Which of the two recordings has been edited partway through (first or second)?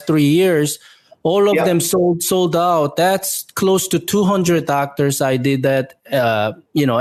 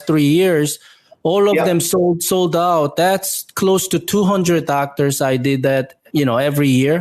second